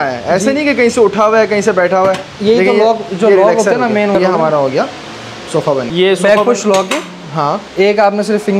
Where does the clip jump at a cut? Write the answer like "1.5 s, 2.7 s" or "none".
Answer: 4.1 s, 5.9 s